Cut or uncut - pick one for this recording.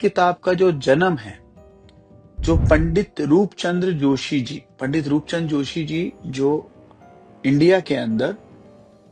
uncut